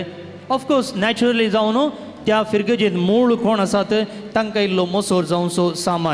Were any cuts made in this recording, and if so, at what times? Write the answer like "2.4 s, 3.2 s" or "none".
none